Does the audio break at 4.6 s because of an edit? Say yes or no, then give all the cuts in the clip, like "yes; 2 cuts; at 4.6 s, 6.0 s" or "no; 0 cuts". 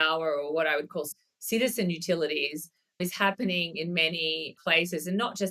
yes; 2 cuts; at 1.2 s, 4.6 s